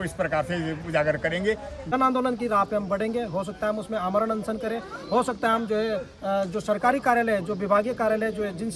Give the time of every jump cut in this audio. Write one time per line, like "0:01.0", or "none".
0:01.8